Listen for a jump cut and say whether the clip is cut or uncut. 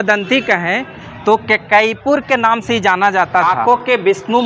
cut